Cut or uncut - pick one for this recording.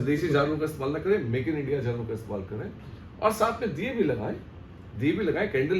uncut